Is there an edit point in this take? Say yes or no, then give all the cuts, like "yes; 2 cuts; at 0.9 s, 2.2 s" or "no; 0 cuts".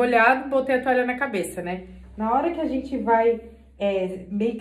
no; 0 cuts